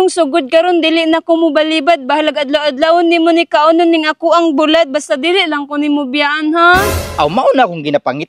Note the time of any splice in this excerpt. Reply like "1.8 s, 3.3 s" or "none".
none